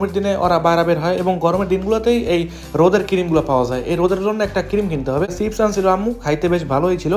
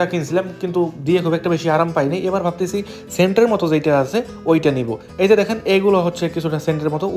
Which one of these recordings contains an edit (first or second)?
first